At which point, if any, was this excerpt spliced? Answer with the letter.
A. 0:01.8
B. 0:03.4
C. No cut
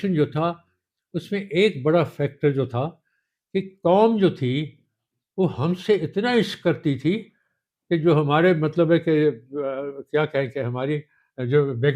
C